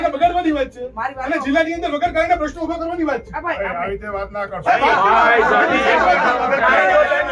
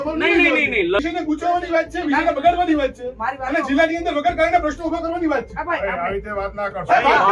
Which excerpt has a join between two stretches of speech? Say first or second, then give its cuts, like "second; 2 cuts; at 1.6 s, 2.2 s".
second; 1 cut; at 1.0 s